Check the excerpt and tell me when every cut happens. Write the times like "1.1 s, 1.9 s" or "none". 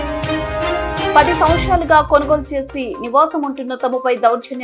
1.1 s